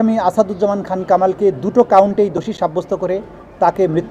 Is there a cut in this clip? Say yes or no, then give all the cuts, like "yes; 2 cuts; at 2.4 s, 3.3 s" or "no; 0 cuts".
no; 0 cuts